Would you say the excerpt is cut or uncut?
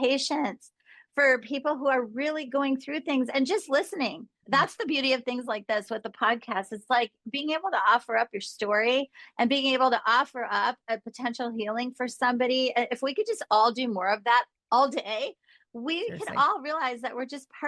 uncut